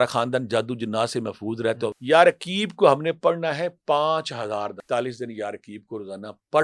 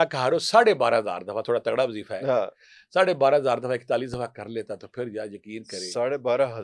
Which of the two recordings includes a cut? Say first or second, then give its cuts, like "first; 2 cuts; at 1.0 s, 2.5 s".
first; 2 cuts; at 2.0 s, 4.8 s